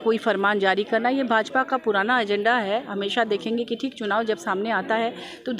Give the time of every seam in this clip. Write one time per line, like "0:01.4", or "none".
none